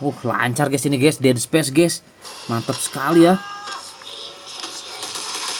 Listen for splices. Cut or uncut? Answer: uncut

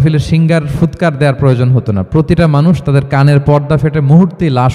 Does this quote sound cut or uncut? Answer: uncut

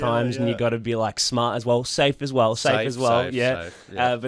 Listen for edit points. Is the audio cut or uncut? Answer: uncut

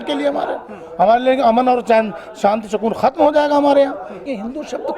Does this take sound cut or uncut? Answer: cut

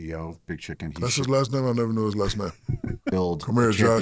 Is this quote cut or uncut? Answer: cut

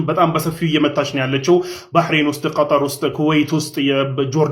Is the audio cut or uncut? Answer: uncut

